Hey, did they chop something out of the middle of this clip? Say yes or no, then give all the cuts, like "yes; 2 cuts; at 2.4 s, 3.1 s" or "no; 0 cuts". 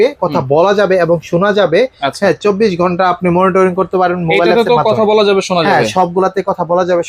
no; 0 cuts